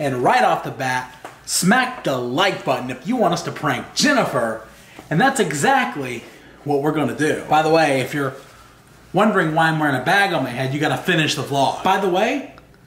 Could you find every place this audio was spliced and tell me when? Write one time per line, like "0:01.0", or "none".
0:07.4
0:11.8